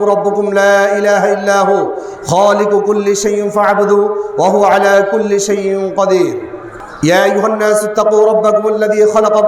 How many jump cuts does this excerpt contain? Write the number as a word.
zero